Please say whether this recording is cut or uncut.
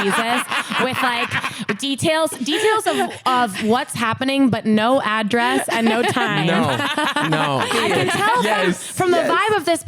cut